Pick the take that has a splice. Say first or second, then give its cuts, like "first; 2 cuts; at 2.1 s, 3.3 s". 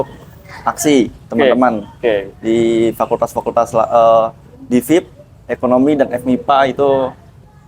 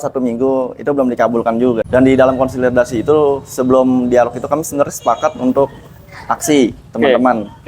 second; 1 cut; at 1.8 s